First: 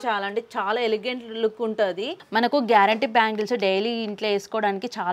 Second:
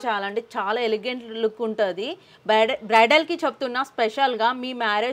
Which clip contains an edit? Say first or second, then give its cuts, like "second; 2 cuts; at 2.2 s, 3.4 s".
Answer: first; 1 cut; at 2.1 s